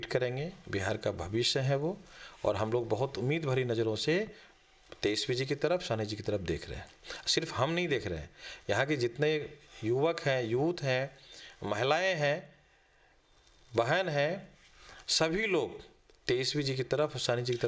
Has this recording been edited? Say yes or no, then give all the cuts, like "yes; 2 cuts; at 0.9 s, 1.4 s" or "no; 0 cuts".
no; 0 cuts